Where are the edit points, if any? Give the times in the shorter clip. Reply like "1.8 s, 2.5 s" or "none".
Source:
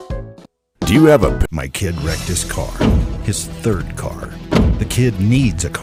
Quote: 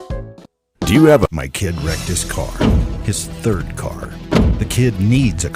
1.3 s